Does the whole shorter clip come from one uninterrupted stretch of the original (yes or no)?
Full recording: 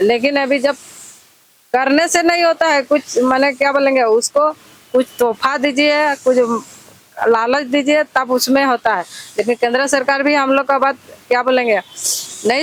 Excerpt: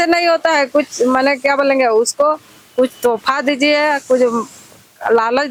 yes